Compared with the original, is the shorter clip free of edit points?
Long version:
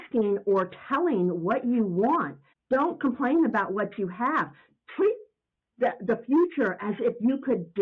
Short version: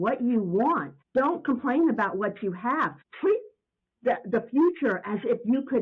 no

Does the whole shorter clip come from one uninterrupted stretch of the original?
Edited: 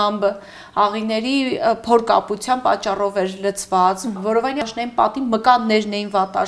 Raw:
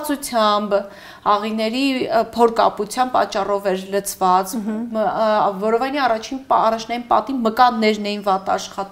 no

